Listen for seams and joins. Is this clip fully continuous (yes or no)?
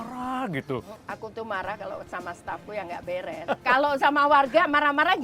no